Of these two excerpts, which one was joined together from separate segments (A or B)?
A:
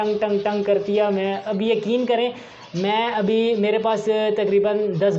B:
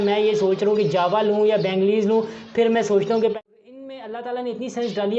B